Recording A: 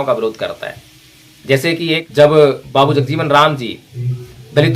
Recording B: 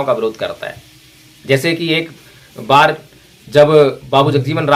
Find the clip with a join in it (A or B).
A